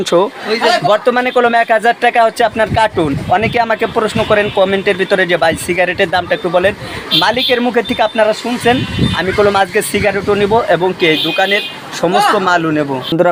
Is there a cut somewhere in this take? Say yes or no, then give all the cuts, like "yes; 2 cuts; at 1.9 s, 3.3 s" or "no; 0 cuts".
no; 0 cuts